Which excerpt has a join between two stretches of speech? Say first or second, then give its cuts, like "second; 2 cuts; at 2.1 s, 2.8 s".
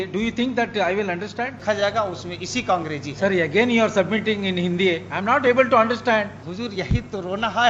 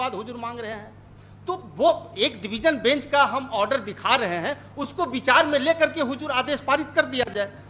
first; 2 cuts; at 1.6 s, 6.4 s